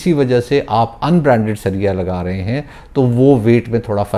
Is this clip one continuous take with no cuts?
yes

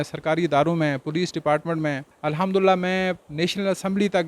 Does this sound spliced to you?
yes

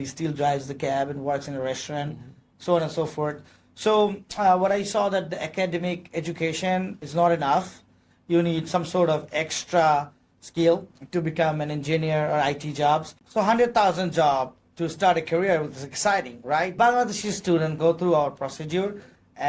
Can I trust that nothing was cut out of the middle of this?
no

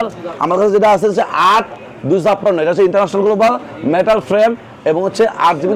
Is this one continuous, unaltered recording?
yes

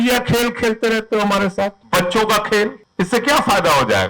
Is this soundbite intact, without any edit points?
no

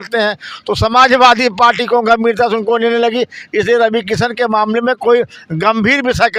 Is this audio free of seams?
yes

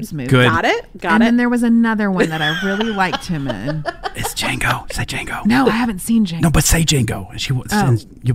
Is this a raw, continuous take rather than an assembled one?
no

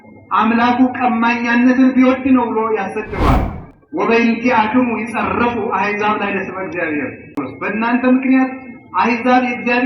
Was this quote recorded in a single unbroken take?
no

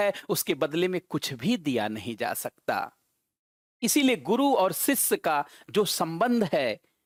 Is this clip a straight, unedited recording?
yes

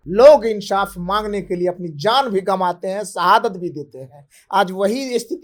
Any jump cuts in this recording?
no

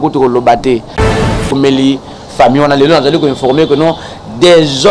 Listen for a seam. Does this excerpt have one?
yes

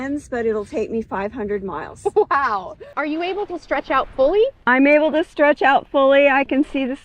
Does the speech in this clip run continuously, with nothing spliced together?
no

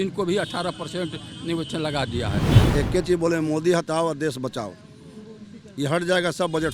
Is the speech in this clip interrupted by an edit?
yes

